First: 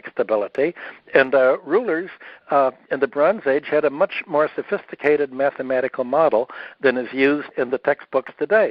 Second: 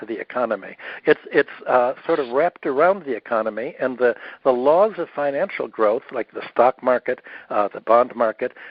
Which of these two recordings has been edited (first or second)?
first